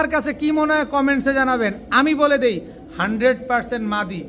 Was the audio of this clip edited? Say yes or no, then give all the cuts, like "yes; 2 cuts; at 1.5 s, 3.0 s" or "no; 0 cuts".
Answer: no; 0 cuts